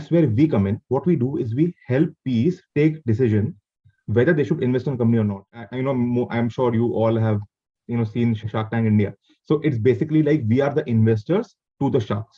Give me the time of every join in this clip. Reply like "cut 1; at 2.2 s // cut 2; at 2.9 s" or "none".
cut 1; at 5.6 s // cut 2; at 8.4 s